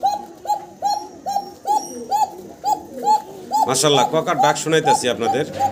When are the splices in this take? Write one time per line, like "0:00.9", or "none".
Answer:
none